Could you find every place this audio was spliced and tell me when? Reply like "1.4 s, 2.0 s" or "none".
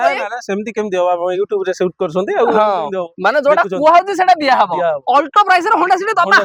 none